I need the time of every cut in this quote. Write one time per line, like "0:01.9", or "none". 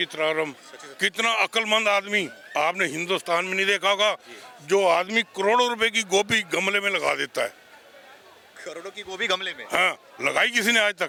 none